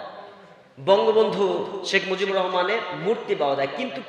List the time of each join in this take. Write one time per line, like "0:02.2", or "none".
none